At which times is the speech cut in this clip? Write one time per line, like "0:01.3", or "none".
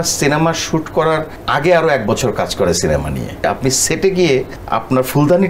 0:01.3
0:03.4
0:04.6

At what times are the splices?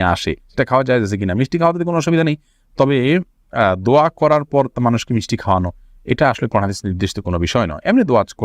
none

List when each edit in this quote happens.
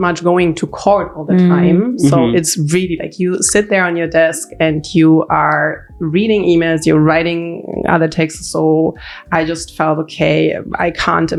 none

